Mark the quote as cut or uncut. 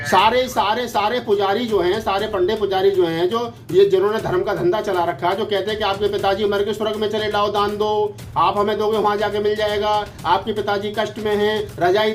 uncut